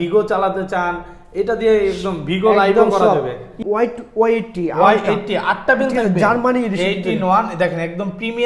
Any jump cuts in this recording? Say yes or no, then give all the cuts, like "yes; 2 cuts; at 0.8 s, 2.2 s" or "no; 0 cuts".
yes; 1 cut; at 3.5 s